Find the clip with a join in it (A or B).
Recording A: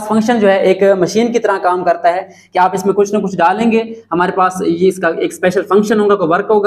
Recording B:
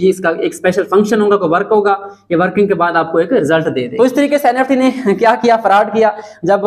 B